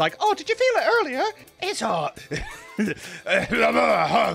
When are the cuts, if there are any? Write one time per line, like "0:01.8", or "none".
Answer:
0:01.4

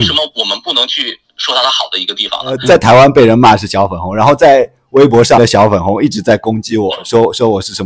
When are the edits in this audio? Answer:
0:02.6
0:05.4

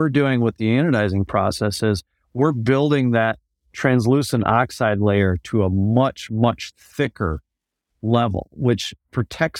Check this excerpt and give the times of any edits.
none

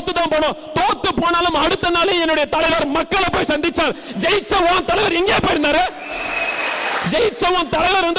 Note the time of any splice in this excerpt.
none

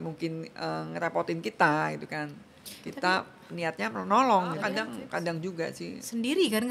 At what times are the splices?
0:04.6

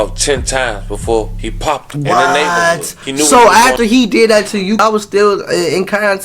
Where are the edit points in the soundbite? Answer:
0:04.8

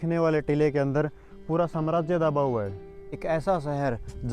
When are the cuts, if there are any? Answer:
0:03.2

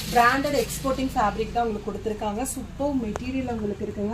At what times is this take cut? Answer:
none

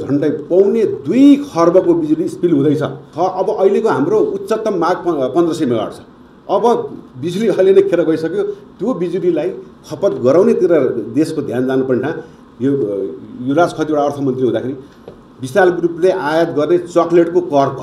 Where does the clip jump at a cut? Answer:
0:03.0

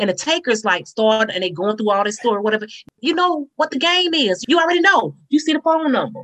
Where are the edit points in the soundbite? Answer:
0:04.4

